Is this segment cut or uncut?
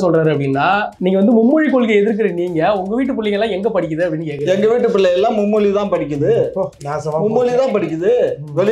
cut